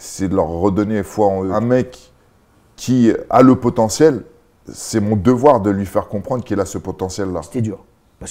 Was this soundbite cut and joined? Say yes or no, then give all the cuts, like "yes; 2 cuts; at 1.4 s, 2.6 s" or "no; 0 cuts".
yes; 2 cuts; at 1.5 s, 7.5 s